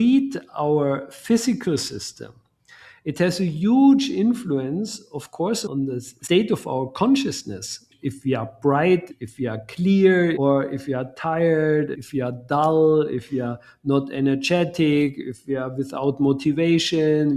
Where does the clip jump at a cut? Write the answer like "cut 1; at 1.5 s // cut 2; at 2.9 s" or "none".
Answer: cut 1; at 10.4 s